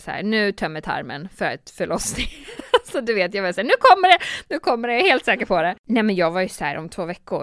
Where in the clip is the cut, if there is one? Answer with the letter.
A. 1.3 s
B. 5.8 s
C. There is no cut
B